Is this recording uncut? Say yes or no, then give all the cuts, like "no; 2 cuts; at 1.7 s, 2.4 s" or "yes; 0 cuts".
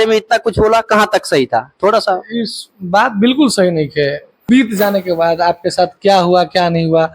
no; 1 cut; at 4.4 s